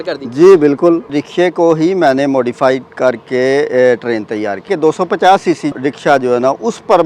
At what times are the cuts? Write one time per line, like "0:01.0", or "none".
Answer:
0:01.2
0:04.7
0:05.7